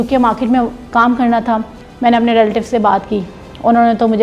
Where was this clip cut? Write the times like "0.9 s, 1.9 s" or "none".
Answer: 1.8 s